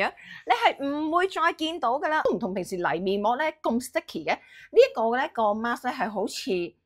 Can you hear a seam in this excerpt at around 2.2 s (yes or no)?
yes